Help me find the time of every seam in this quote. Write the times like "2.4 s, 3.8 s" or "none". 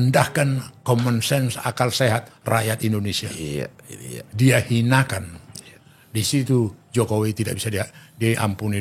none